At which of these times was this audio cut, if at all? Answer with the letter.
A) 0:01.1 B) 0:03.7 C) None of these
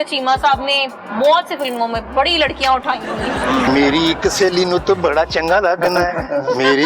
B